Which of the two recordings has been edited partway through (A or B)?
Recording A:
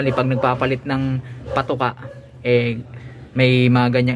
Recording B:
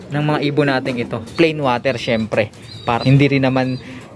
B